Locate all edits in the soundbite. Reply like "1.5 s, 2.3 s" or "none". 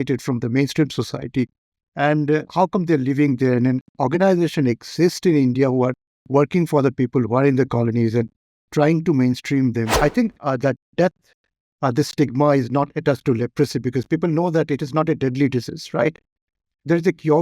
9.9 s